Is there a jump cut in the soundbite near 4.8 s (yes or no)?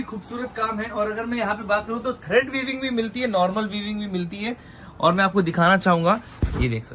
no